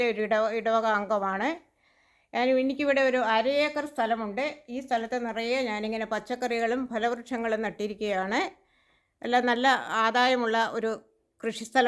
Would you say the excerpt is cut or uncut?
uncut